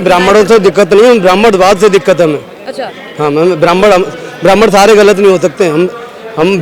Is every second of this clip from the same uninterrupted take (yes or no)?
yes